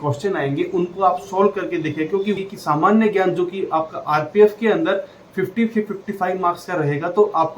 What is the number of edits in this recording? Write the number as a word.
one